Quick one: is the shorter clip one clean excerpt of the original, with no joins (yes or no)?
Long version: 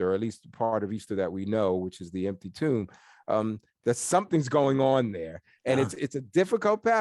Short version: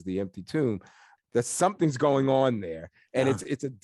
no